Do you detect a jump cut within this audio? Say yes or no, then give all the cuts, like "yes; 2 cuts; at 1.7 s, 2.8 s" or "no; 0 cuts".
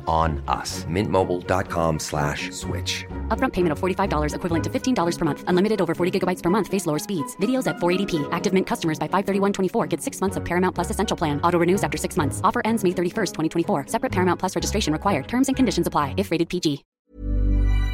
yes; 1 cut; at 16.9 s